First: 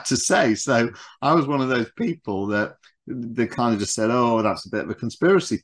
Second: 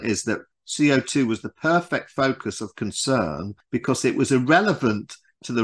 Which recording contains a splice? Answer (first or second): second